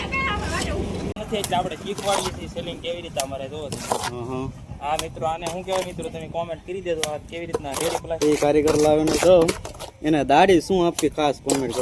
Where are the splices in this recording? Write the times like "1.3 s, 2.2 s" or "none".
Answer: 1.2 s, 8.2 s